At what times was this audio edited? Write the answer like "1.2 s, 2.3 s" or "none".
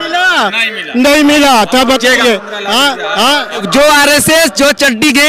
3.6 s